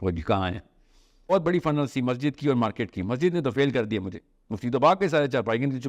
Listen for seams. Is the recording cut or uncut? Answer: cut